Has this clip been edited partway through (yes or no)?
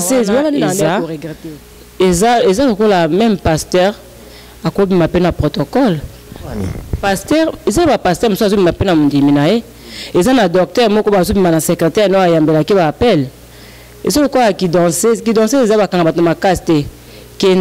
yes